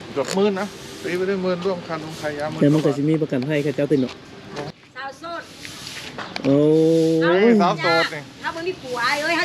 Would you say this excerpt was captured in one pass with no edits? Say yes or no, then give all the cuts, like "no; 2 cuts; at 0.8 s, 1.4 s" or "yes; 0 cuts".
no; 1 cut; at 4.7 s